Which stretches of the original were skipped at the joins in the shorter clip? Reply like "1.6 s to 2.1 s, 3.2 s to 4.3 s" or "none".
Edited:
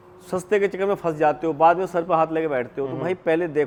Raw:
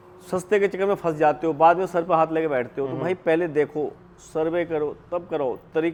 none